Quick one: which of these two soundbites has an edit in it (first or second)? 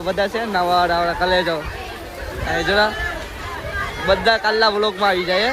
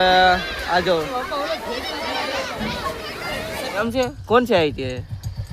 second